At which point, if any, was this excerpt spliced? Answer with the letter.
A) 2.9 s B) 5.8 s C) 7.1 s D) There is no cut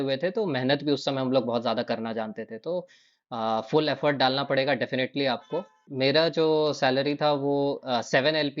B